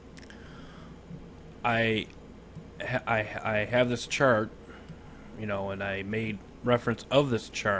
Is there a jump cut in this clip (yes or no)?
yes